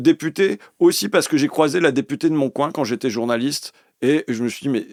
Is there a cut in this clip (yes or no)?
no